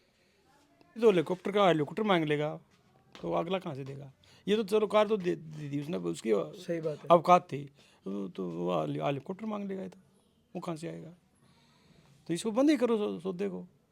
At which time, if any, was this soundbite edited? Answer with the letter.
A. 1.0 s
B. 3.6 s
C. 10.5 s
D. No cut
A